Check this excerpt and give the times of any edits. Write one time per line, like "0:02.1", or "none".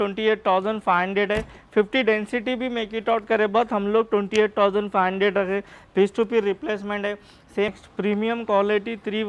0:07.7